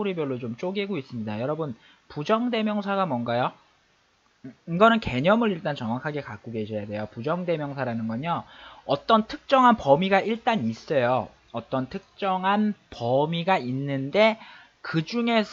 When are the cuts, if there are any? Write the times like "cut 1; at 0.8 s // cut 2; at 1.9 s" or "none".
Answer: cut 1; at 14.0 s

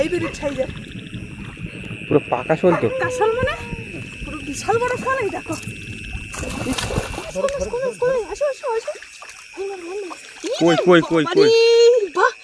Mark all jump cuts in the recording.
cut 1; at 7.3 s

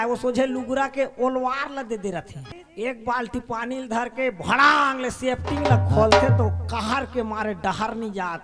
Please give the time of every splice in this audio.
cut 1; at 2.5 s

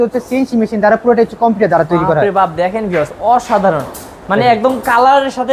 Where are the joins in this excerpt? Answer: none

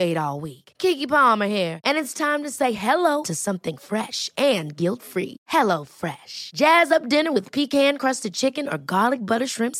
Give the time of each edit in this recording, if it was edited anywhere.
none

